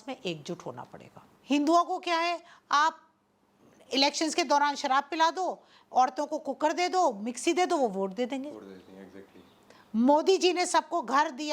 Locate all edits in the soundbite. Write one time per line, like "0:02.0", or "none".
0:01.3

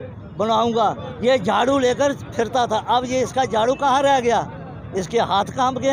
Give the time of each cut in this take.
none

